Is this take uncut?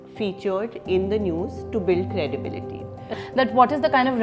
no; 1 cut; at 3.1 s

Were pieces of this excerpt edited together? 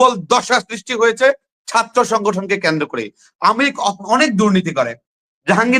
no; 0 cuts

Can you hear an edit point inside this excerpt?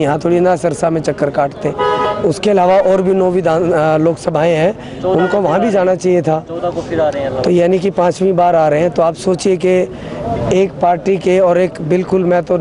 no; 0 cuts

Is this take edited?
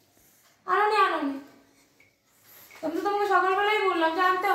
no; 0 cuts

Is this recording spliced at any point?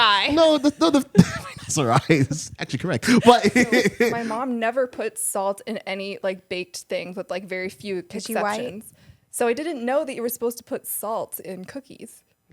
yes; 1 cut; at 4.2 s

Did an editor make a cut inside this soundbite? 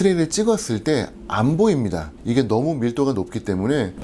no; 0 cuts

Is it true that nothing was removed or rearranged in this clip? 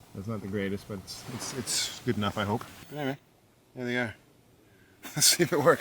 no; 1 cut; at 2.8 s

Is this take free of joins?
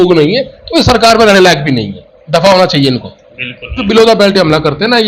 no; 1 cut; at 3.8 s

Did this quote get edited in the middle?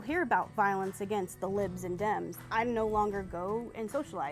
yes; 1 cut; at 2.4 s

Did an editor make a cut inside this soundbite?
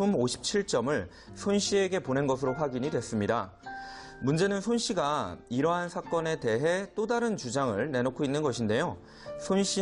yes; 1 cut; at 6.3 s

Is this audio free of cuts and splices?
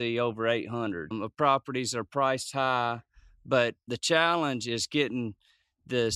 no; 2 cuts; at 1.1 s, 3.9 s

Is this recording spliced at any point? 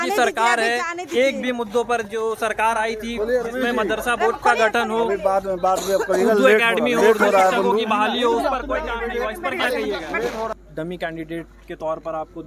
yes; 1 cut; at 10.5 s

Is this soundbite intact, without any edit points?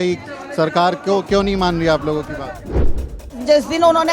no; 1 cut; at 3.0 s

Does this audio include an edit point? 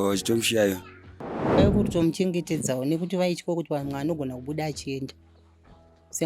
yes; 1 cut; at 1.5 s

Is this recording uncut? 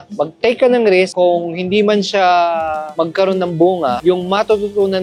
yes; 0 cuts

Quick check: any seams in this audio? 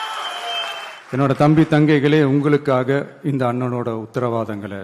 yes; 1 cut; at 0.9 s

